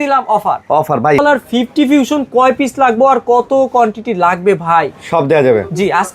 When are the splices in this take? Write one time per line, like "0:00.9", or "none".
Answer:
0:01.2